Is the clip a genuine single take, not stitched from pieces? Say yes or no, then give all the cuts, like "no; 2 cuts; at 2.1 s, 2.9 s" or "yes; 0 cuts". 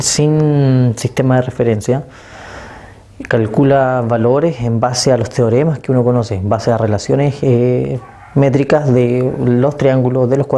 no; 1 cut; at 2.0 s